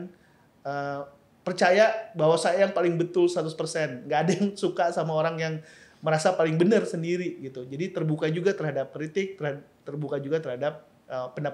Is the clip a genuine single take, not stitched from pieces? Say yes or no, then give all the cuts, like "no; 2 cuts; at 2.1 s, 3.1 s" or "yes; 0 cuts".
yes; 0 cuts